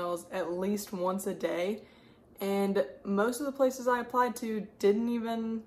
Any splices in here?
no; 0 cuts

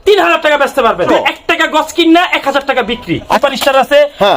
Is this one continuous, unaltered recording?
no; 2 cuts; at 1.1 s, 3.4 s

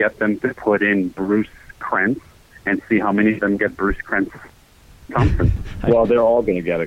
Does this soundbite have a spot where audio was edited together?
yes; 1 cut; at 5.6 s

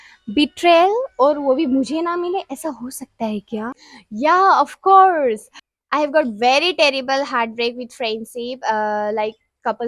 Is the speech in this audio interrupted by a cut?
no; 0 cuts

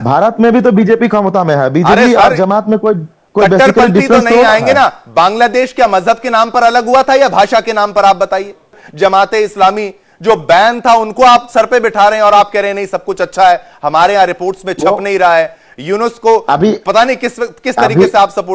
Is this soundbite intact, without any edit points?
yes; 0 cuts

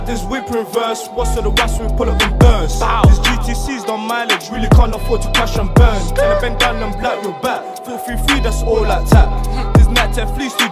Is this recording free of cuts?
yes; 0 cuts

